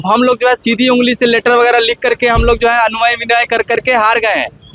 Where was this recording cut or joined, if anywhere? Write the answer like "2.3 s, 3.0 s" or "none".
none